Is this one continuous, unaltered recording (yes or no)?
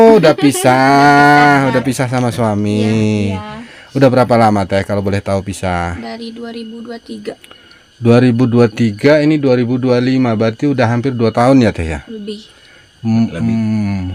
yes